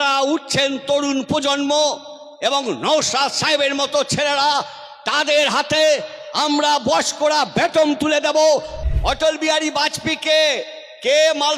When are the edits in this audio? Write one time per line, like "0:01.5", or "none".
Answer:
0:08.8